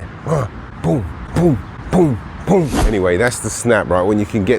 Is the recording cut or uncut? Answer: cut